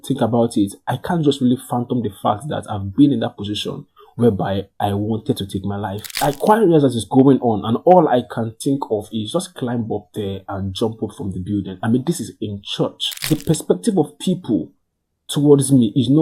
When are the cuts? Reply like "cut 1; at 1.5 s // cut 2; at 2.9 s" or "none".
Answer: cut 1; at 6.1 s // cut 2; at 13.2 s